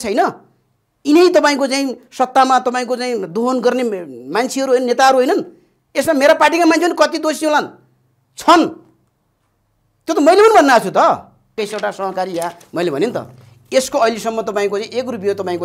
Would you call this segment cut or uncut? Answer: cut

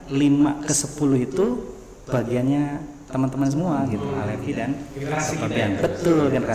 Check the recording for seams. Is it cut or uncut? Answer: uncut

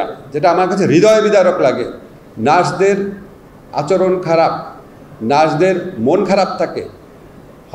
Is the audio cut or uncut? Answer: uncut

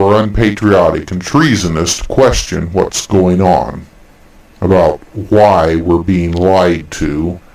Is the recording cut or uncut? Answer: cut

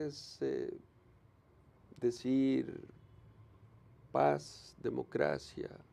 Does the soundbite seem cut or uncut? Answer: uncut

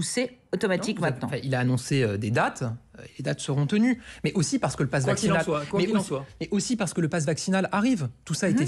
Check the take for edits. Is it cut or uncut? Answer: cut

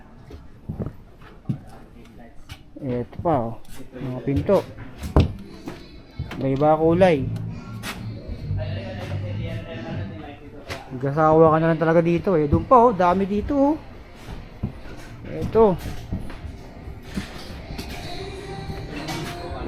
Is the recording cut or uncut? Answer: uncut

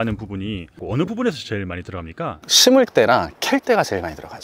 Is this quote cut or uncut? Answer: uncut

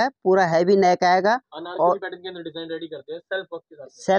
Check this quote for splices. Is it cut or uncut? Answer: uncut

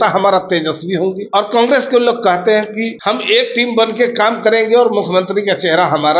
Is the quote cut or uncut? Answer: cut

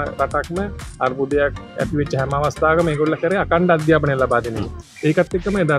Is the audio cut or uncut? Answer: cut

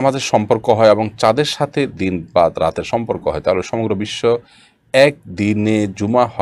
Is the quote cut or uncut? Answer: uncut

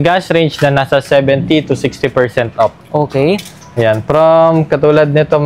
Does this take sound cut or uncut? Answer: uncut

